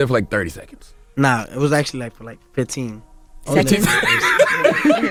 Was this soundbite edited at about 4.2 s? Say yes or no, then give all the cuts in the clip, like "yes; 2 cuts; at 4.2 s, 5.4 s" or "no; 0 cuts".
no; 0 cuts